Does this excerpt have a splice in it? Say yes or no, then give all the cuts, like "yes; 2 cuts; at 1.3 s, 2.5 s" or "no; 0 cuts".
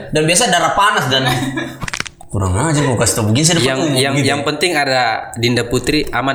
no; 0 cuts